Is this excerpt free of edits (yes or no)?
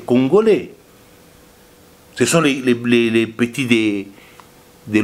yes